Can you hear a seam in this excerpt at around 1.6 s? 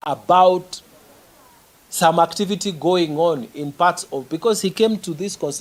no; 0 cuts

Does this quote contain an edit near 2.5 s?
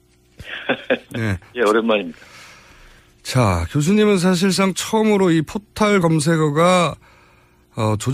no; 1 cut; at 3.9 s

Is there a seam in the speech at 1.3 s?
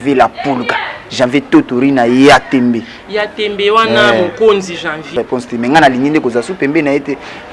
no; 1 cut; at 5.2 s

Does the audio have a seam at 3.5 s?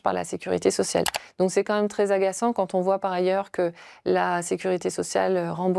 no; 0 cuts

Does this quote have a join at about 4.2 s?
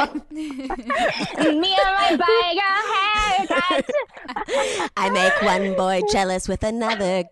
yes; 1 cut; at 4.2 s

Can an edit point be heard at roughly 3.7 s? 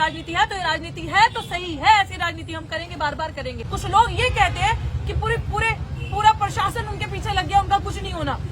yes; 1 cut; at 3.7 s

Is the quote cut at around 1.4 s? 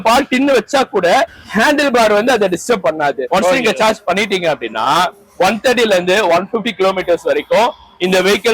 yes; 2 cuts; at 1.4 s, 3.2 s

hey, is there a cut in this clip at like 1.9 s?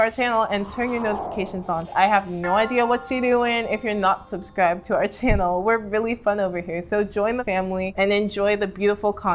yes; 2 cuts; at 1.9 s, 7.6 s

